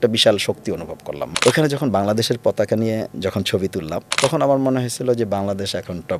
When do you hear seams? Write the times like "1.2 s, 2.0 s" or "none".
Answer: 1.2 s, 4.1 s